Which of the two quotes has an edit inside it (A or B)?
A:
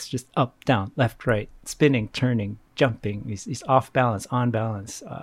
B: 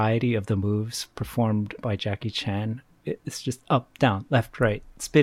B